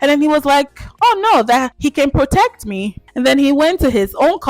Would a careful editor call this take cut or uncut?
cut